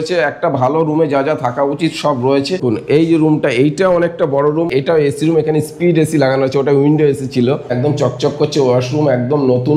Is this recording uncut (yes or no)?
no